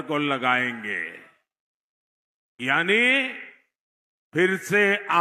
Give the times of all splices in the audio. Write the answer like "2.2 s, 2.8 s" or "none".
none